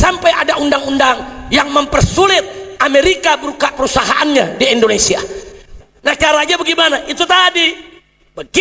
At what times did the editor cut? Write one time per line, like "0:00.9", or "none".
0:05.7